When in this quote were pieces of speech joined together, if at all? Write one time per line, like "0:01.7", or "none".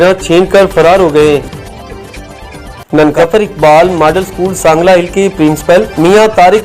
0:01.4
0:03.1